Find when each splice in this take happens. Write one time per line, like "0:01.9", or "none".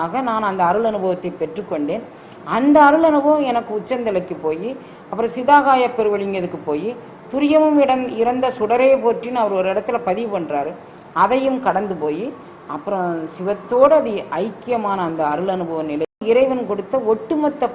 0:16.2